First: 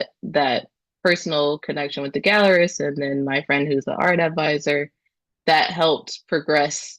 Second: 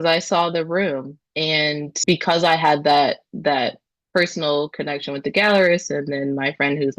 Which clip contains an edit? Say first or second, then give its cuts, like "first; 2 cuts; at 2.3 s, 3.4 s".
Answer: second; 1 cut; at 2.0 s